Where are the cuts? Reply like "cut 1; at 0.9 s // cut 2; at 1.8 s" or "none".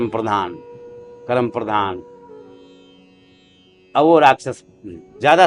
cut 1; at 2.0 s // cut 2; at 3.8 s

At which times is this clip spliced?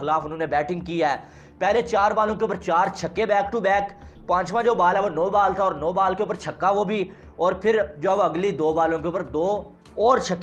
none

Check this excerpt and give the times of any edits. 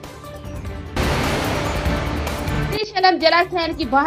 cut 1; at 2.5 s

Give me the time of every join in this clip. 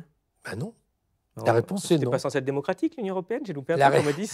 none

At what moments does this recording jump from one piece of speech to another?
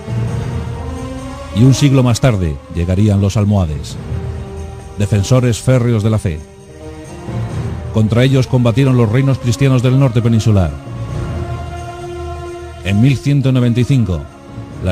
none

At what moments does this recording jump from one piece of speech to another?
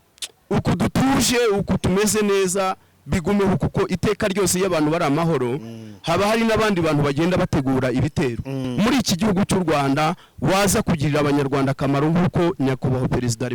cut 1; at 8.6 s

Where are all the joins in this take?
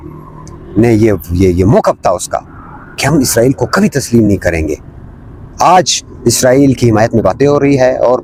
none

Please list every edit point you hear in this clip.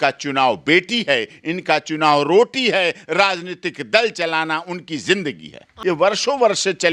cut 1; at 5.7 s

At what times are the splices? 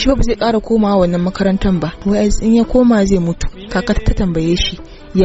cut 1; at 2.0 s // cut 2; at 3.5 s

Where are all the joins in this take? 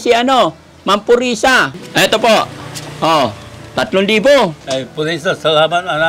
cut 1; at 1.8 s // cut 2; at 4.6 s

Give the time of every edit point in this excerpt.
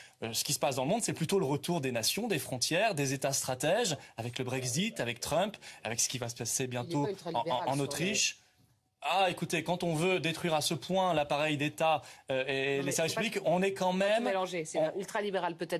cut 1; at 10.3 s

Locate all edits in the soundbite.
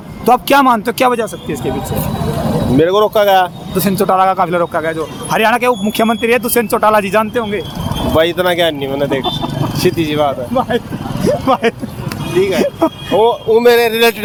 none

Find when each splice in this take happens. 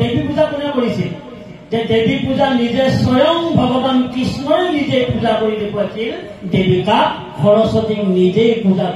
none

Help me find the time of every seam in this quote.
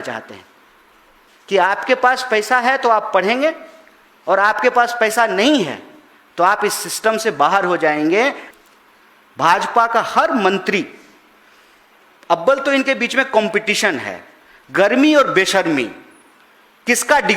cut 1; at 8.4 s

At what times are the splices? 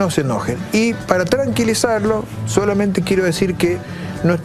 none

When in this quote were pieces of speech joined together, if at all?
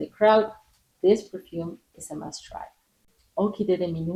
none

